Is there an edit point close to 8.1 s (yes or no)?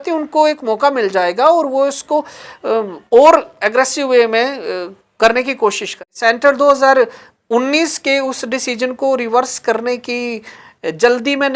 no